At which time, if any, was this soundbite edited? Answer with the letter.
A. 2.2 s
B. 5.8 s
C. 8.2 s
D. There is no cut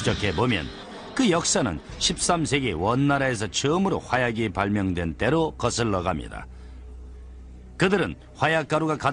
B